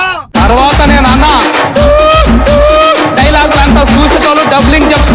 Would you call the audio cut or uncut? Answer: uncut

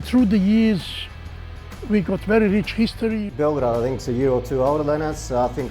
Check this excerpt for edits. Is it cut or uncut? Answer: cut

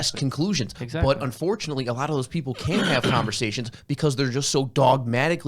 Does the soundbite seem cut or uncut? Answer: uncut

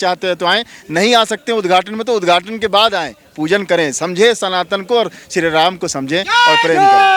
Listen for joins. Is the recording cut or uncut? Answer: uncut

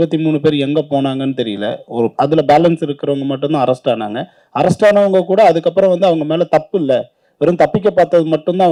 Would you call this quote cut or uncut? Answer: uncut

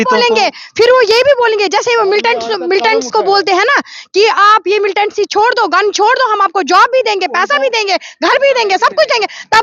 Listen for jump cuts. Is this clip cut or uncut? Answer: uncut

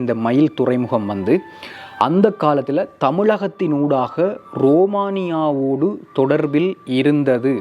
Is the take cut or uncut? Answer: uncut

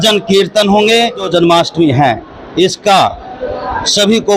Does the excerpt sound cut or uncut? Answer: cut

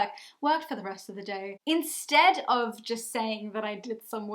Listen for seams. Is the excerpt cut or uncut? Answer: cut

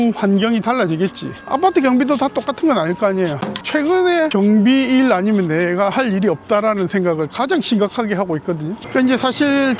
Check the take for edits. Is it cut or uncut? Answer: cut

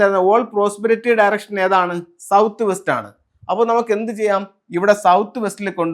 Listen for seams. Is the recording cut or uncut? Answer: uncut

